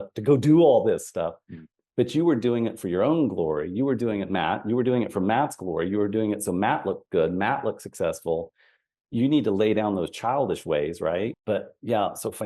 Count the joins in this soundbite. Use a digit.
1